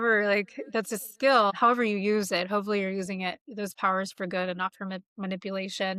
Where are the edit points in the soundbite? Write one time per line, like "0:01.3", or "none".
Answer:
0:01.6